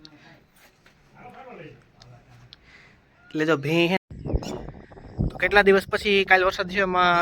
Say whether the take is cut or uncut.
cut